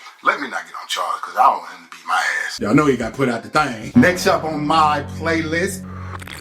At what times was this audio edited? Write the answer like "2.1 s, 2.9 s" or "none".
2.5 s, 3.8 s